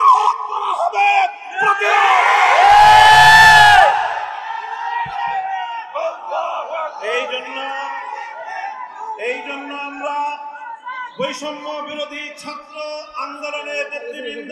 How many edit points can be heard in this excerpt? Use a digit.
0